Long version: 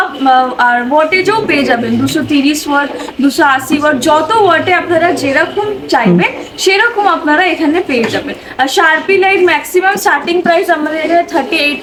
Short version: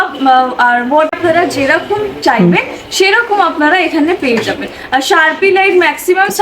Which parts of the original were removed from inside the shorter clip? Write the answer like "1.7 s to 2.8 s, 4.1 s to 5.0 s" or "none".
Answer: 1.1 s to 4.8 s

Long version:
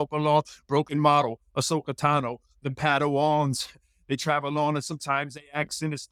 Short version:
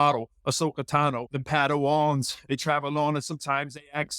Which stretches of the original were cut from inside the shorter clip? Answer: 2.4 s to 2.6 s, 3.7 s to 3.9 s

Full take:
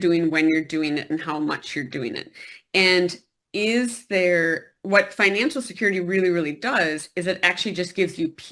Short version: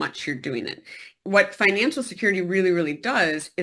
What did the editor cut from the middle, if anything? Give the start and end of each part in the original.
2.6 s to 4.7 s

